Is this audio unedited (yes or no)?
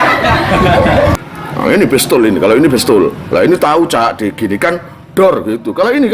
no